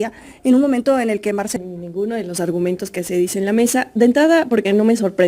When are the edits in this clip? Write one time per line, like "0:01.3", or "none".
0:01.5